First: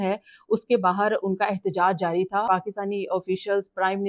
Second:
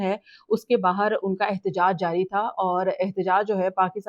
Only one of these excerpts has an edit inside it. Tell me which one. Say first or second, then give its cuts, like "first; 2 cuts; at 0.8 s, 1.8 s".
first; 1 cut; at 2.5 s